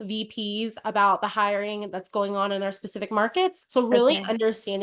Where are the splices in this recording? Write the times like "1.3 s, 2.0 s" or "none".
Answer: 3.6 s